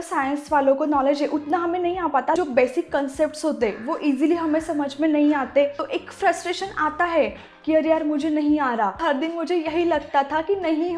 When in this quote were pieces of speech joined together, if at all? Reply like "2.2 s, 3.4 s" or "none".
2.3 s, 5.9 s, 9.0 s